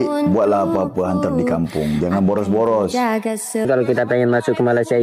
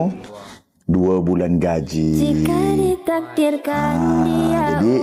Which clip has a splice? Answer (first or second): first